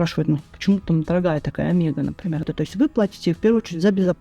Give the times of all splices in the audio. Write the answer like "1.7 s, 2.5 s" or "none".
2.5 s